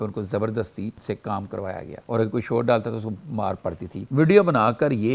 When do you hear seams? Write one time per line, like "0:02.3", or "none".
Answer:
0:01.4
0:04.1